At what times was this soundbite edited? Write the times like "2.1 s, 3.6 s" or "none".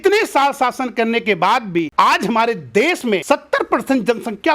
1.9 s, 3.2 s